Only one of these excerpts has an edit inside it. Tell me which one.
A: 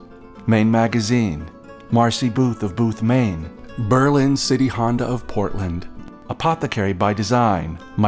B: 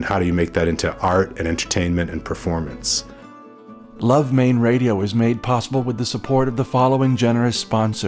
B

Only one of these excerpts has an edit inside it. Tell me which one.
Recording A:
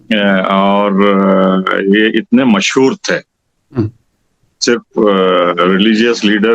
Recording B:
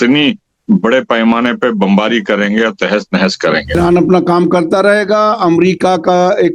B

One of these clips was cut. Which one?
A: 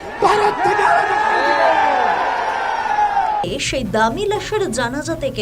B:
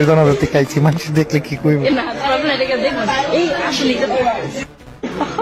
A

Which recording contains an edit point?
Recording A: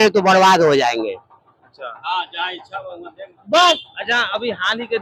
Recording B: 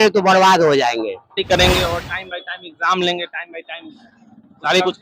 B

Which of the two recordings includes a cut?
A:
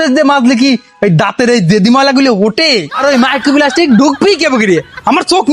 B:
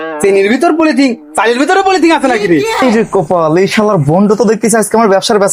A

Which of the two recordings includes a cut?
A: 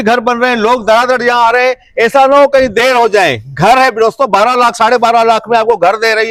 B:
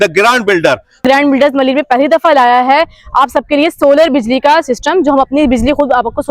B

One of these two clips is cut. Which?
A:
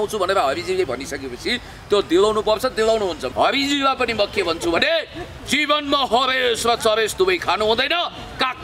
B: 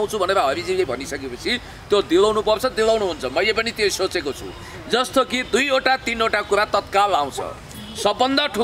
A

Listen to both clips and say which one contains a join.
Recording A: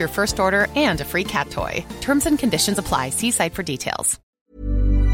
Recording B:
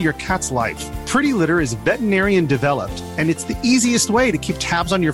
A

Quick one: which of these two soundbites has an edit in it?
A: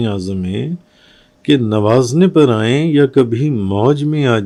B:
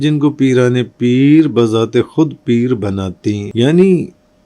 B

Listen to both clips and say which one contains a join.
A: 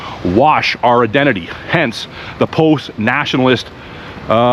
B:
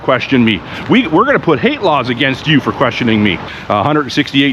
B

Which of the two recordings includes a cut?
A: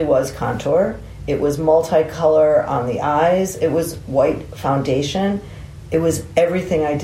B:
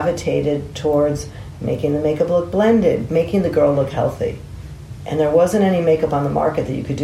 B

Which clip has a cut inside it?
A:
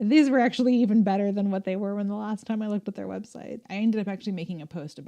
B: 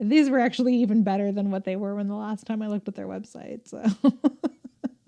A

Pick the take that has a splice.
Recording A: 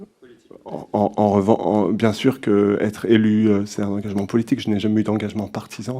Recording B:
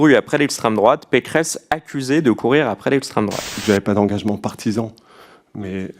B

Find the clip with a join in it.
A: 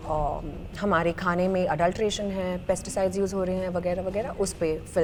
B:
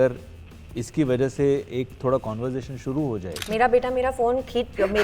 B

